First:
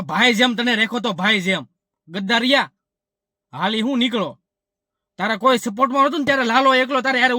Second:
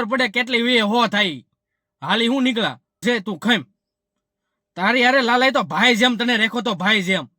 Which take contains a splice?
second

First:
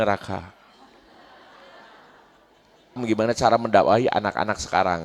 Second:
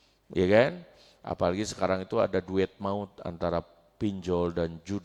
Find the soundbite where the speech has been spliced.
first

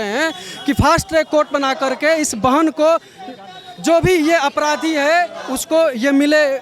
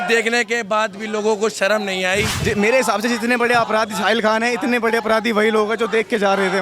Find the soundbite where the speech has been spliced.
second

